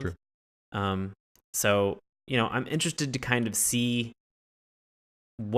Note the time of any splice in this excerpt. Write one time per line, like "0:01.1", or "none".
0:03.1